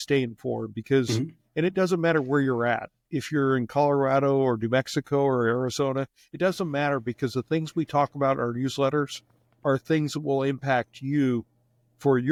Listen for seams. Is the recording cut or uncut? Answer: uncut